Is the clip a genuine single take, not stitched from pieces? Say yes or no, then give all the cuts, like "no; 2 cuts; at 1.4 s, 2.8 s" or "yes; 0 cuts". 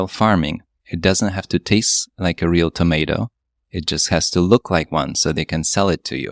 yes; 0 cuts